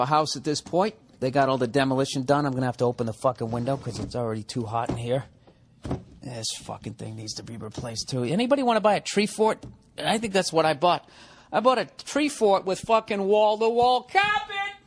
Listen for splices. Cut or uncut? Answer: uncut